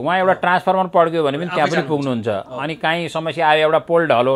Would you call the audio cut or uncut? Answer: uncut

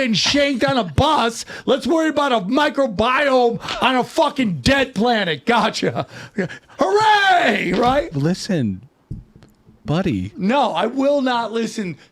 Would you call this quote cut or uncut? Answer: uncut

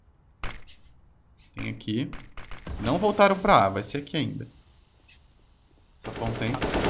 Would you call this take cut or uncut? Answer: uncut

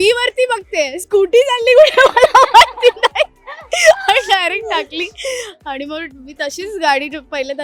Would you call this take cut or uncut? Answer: uncut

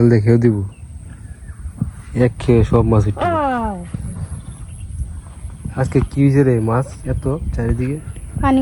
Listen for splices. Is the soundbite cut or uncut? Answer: uncut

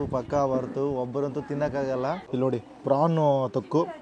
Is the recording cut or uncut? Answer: cut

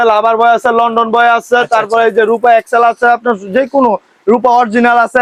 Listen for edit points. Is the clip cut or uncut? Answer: uncut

